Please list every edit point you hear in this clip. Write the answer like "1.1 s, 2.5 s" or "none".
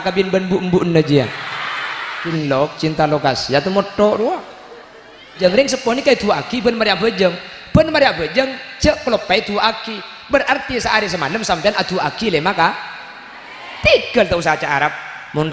2.3 s, 5.3 s